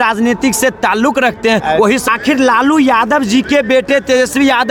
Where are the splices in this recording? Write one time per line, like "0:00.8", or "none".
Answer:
0:02.1